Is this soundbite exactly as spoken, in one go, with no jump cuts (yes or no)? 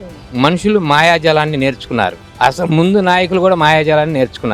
yes